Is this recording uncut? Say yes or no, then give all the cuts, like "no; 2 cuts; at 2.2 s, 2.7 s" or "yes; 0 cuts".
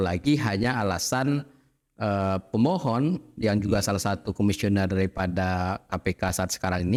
yes; 0 cuts